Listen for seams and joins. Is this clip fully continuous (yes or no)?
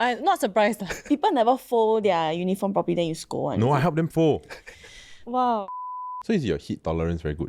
no